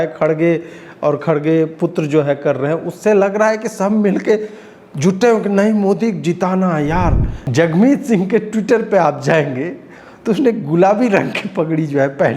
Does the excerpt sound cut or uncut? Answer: cut